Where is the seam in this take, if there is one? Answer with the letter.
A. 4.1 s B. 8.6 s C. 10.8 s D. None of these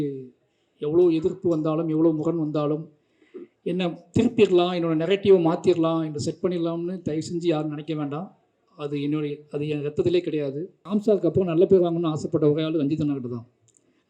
C